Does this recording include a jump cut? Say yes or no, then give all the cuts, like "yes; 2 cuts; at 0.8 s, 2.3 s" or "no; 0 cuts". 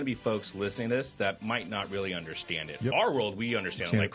no; 0 cuts